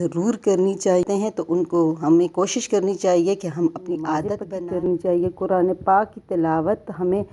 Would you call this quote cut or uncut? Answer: cut